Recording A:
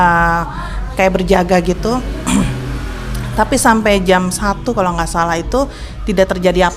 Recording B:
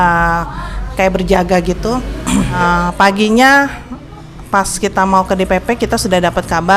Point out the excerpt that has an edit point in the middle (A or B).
B